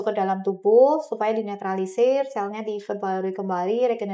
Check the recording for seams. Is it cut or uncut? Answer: uncut